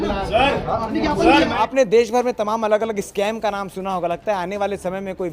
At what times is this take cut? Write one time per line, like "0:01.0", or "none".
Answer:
0:01.7